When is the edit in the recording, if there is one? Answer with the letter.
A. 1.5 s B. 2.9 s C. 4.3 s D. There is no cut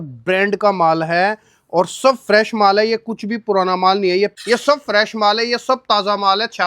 C